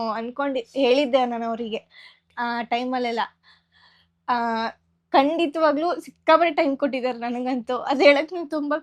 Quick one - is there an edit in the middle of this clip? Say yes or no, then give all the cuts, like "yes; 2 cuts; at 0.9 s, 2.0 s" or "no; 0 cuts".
no; 0 cuts